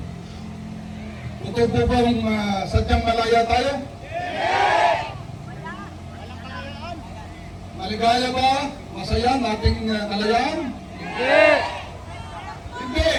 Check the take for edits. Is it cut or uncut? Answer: uncut